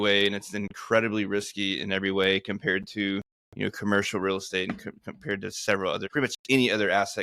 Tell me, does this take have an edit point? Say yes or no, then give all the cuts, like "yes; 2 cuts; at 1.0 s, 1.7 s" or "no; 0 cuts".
yes; 1 cut; at 6.0 s